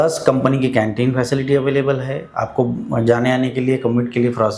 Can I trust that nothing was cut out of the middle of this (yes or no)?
yes